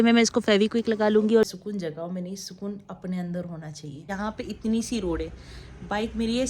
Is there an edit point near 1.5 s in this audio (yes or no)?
yes